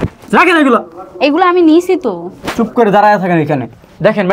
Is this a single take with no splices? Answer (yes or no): yes